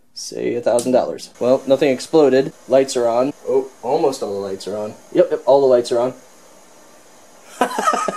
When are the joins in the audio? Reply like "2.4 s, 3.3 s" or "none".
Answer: 1.2 s, 2.6 s, 3.4 s